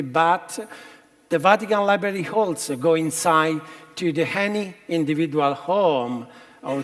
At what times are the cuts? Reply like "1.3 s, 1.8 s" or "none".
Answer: none